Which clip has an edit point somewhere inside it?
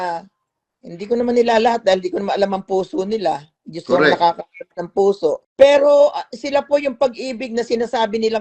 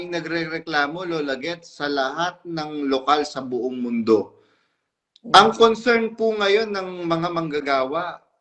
first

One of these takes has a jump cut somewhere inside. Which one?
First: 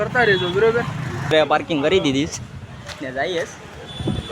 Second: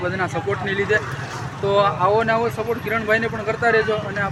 first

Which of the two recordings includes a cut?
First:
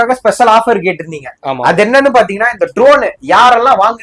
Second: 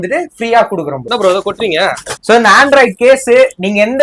second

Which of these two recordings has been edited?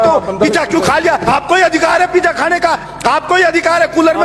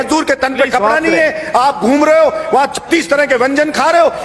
first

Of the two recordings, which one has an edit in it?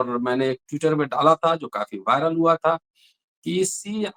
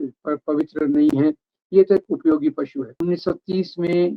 second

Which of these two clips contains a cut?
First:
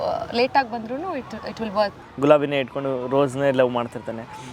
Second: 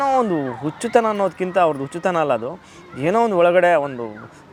first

